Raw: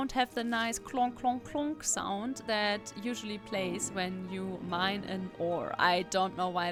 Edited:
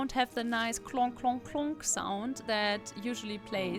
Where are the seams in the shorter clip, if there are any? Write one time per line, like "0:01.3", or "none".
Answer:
none